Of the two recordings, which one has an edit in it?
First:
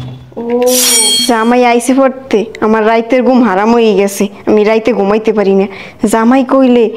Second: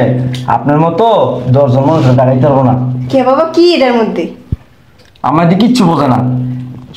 first; 1 cut; at 1.2 s

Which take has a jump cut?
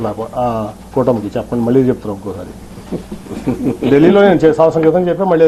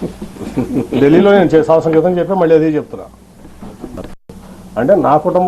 second; 1 cut; at 4.4 s

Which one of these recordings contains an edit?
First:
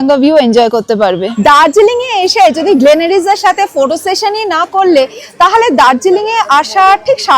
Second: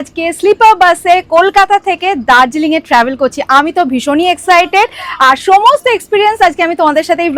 first; 1 cut; at 1.3 s

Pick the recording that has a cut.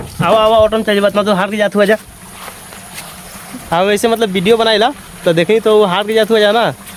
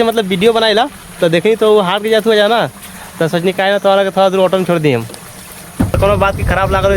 second; 1 cut; at 6.0 s

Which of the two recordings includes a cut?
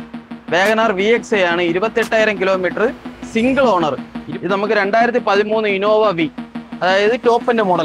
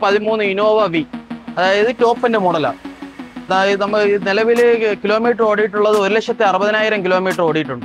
first; 1 cut; at 4.2 s

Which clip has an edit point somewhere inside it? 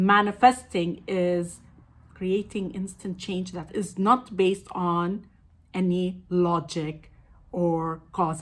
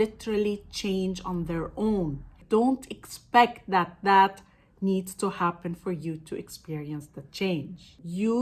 second; 1 cut; at 2.3 s

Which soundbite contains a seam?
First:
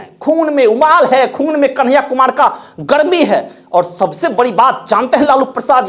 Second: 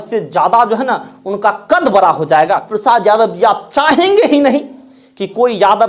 second; 1 cut; at 2.7 s

